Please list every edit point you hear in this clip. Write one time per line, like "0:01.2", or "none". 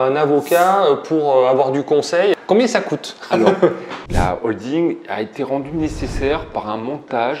0:02.4
0:04.0